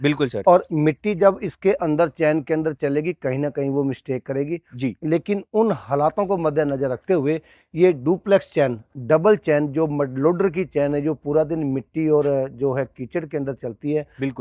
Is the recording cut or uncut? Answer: uncut